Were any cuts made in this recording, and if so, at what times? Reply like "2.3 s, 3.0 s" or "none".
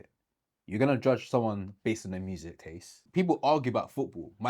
3.1 s